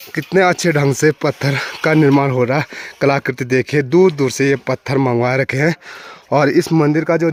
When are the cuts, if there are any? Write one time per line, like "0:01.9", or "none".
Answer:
none